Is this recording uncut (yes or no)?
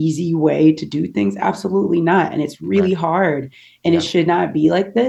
yes